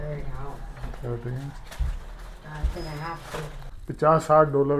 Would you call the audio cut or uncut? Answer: cut